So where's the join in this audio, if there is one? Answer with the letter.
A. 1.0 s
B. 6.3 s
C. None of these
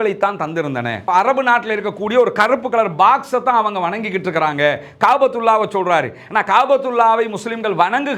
A